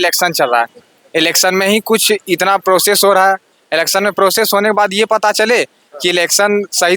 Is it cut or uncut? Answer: uncut